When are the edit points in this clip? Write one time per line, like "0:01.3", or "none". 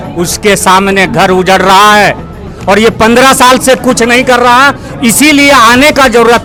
none